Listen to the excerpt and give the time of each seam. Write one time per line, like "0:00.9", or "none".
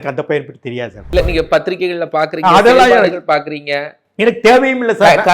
0:01.0